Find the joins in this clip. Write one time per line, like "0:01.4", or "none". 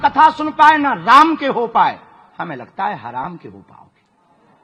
none